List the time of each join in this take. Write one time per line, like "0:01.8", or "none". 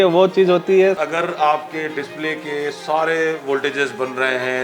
0:01.0